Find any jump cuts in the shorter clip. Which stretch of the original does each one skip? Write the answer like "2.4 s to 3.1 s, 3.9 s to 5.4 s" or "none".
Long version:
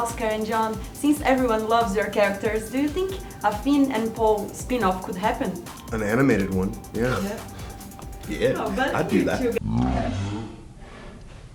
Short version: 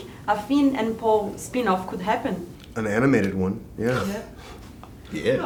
none